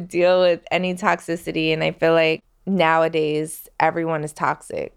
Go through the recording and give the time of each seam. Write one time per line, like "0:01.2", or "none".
0:02.5